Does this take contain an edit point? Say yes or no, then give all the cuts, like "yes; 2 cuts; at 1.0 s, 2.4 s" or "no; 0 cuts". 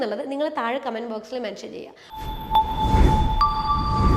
yes; 1 cut; at 2.0 s